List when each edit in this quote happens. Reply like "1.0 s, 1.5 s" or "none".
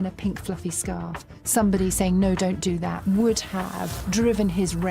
2.9 s, 4.0 s